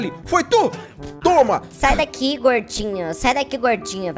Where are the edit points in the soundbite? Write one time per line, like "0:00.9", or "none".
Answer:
0:01.7

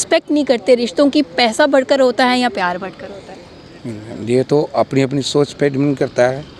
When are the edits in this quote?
none

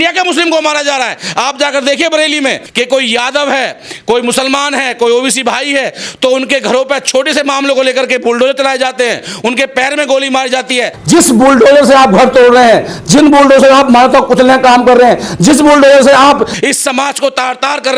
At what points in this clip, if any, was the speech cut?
0:02.6
0:10.9

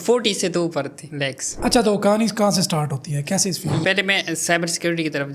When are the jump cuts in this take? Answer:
0:01.5
0:03.8

